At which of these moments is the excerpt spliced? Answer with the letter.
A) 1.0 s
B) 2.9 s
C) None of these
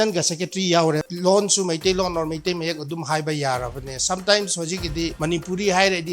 A